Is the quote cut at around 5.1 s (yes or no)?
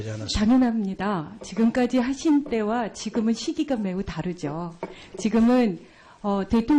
yes